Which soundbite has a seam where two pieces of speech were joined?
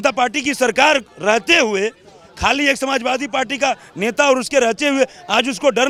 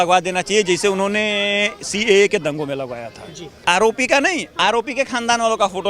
second; 1 cut; at 3.6 s

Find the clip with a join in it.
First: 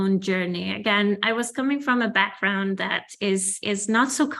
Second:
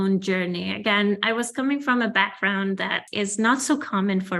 second; 1 cut; at 3.0 s

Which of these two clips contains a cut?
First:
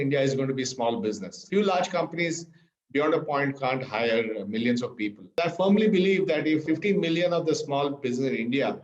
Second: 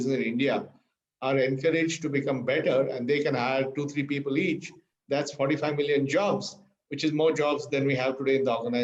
first; 3 cuts; at 1.3 s, 5.4 s, 6.6 s

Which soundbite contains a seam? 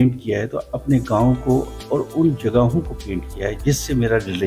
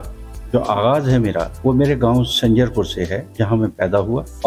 second; 2 cuts; at 1.5 s, 3.2 s

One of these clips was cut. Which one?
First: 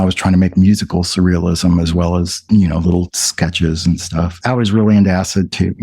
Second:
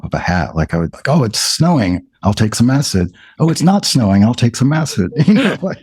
first; 1 cut; at 4.4 s

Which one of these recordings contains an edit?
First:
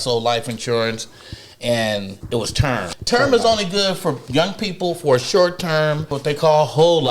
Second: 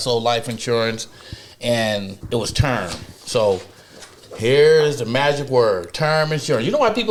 first; 2 cuts; at 2.9 s, 6.1 s

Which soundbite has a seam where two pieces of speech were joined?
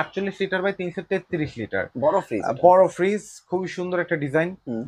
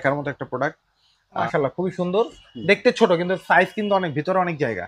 second; 1 cut; at 1.4 s

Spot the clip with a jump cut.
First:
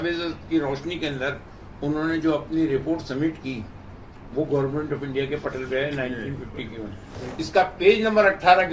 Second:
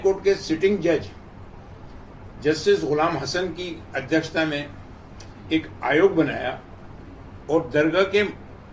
first; 1 cut; at 7.2 s

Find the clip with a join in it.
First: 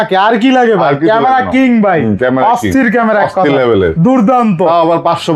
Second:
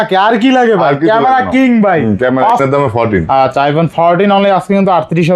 second; 1 cut; at 2.5 s

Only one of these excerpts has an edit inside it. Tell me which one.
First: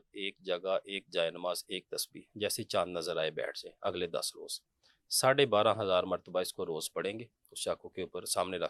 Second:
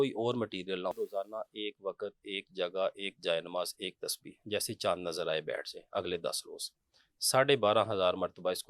second; 1 cut; at 1.0 s

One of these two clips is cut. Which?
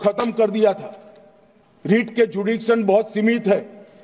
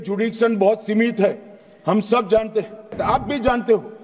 second; 1 cut; at 2.9 s

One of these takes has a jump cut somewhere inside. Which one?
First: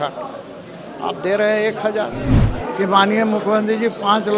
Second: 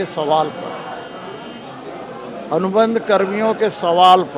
first; 1 cut; at 2.4 s

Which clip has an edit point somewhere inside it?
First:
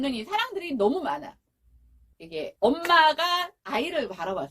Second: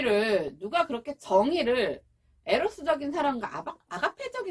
first; 2 cuts; at 2.2 s, 3.6 s

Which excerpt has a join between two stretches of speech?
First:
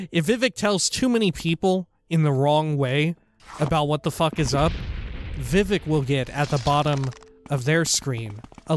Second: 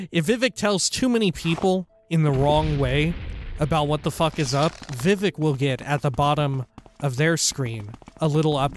second; 1 cut; at 4.9 s

